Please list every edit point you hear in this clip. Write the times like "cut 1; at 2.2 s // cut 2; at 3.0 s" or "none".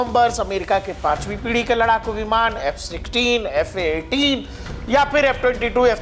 none